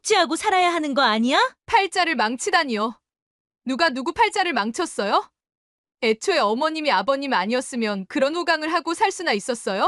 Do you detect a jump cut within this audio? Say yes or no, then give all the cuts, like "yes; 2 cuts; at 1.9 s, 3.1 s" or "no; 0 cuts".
yes; 1 cut; at 1.6 s